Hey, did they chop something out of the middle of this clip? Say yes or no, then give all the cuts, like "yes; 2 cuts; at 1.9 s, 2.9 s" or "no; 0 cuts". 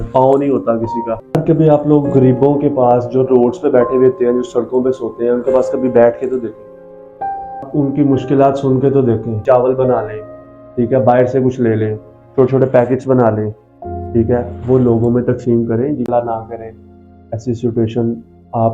yes; 4 cuts; at 1.1 s, 7.7 s, 9.4 s, 16.1 s